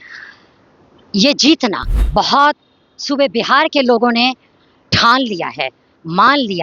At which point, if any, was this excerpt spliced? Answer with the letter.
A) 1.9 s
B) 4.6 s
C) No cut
A